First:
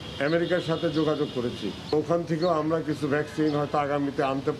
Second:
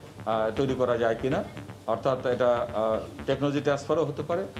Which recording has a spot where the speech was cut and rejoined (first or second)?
first